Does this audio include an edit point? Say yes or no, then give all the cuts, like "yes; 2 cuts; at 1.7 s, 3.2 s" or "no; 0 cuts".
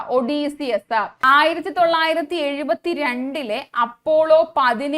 yes; 1 cut; at 1.1 s